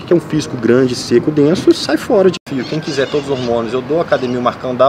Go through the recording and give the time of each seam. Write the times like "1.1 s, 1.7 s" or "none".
2.4 s